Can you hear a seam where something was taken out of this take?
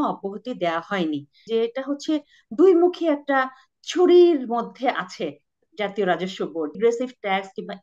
yes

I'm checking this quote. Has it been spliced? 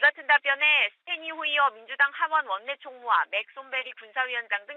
no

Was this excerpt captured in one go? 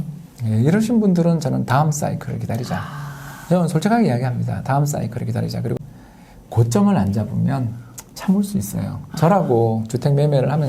no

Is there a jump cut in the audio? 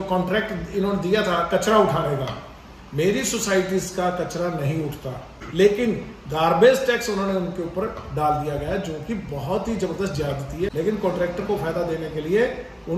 yes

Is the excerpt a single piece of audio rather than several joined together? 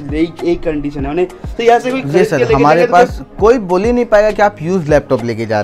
yes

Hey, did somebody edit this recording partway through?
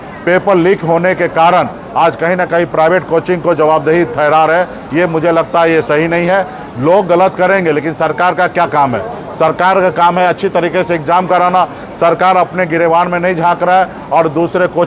no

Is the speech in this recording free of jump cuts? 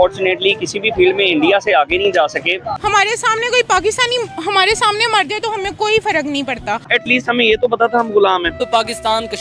no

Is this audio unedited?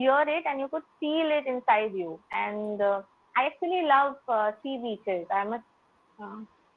yes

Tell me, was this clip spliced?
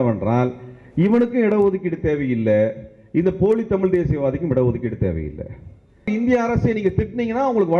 yes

